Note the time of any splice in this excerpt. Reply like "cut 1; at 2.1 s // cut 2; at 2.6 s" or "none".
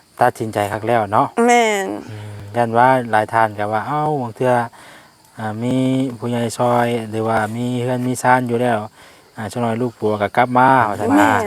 none